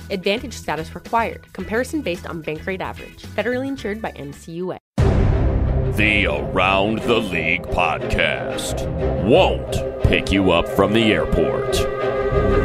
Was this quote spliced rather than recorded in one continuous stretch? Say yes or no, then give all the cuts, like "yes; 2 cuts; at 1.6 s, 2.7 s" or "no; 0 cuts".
yes; 1 cut; at 4.8 s